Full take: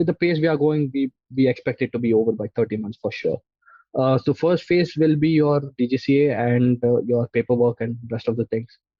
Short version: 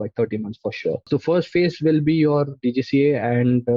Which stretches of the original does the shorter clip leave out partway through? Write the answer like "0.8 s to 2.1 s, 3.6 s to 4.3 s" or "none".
3.5 s to 4.2 s